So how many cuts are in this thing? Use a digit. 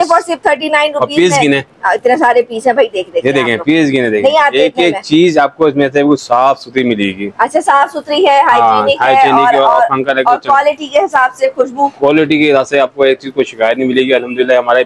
0